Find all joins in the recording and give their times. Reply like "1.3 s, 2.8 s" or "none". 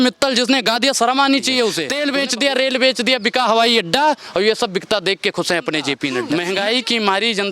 1.9 s, 6.2 s